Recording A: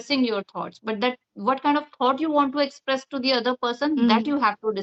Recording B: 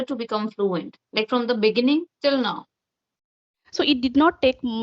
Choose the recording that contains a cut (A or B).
B